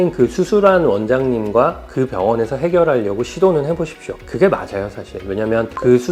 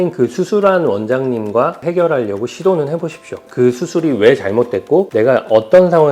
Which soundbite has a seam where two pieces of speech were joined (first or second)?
second